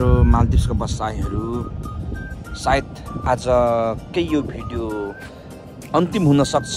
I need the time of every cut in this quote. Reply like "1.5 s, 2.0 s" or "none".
none